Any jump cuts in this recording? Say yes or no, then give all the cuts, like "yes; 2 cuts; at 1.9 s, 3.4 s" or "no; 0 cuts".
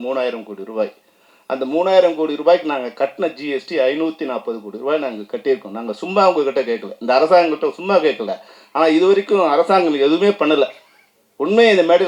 no; 0 cuts